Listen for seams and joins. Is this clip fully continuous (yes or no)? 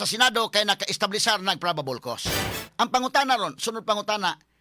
no